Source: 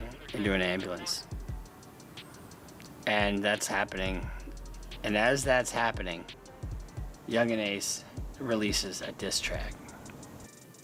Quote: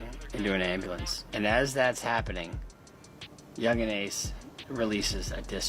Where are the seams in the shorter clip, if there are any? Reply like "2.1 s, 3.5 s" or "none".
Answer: 1.2 s